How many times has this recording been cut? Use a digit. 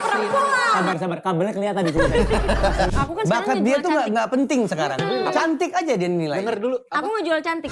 1